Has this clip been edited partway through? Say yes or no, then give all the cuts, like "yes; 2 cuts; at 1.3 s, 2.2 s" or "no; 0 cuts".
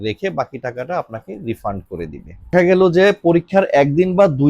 yes; 1 cut; at 2.5 s